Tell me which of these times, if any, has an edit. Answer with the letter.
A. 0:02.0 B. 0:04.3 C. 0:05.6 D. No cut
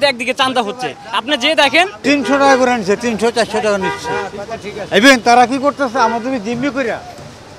A